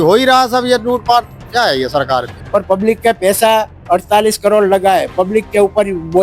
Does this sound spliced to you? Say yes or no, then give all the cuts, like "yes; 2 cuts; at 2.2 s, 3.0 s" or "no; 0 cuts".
yes; 1 cut; at 2.4 s